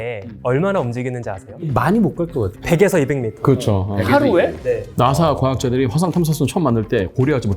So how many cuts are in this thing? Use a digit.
2